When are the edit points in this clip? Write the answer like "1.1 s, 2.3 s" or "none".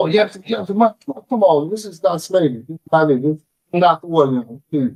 none